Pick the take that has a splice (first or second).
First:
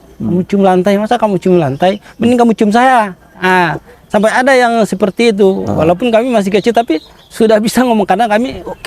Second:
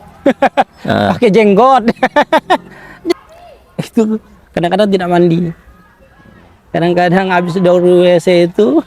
second